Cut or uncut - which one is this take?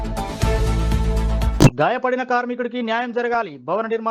cut